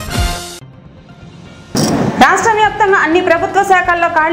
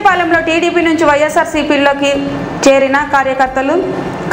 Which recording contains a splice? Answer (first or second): first